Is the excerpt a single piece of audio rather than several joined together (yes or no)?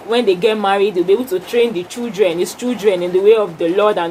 yes